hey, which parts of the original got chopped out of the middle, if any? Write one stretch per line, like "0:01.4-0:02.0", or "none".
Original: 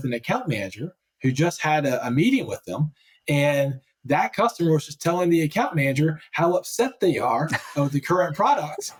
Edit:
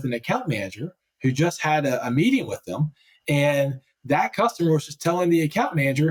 none